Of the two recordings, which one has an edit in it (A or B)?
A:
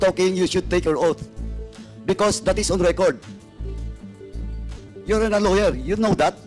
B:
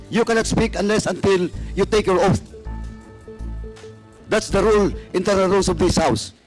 A